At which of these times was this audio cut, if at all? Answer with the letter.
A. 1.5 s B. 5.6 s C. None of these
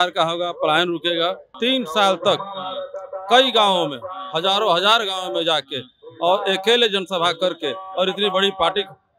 A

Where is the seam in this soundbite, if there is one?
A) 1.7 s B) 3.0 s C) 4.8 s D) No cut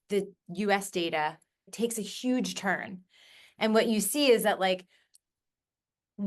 A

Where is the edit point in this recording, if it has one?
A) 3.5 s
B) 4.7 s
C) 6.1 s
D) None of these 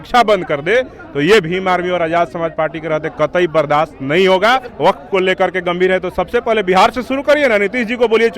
B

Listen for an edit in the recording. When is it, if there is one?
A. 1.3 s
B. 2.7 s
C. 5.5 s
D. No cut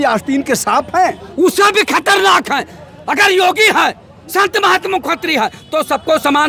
D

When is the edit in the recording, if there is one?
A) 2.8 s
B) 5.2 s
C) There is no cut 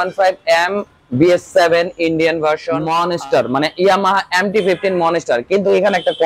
A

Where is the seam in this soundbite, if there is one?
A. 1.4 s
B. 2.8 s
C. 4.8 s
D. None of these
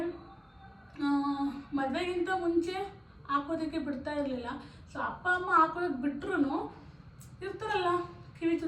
D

